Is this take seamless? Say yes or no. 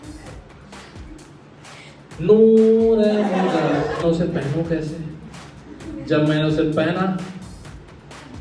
no